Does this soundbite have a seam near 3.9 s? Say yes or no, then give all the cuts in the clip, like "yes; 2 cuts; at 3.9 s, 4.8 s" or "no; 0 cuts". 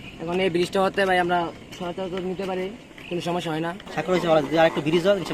yes; 1 cut; at 3.9 s